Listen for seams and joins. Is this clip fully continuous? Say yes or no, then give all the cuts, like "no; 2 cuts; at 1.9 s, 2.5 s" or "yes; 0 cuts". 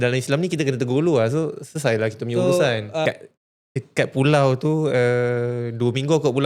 no; 1 cut; at 3.1 s